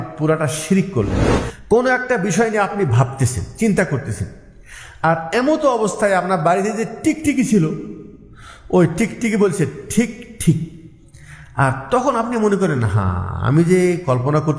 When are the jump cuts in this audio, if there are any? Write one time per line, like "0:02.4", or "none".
0:01.2